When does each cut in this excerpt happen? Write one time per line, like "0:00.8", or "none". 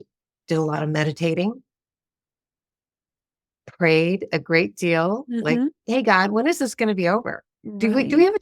none